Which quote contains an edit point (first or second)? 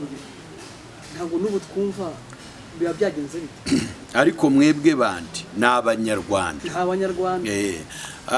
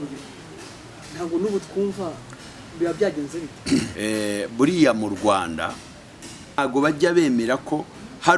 second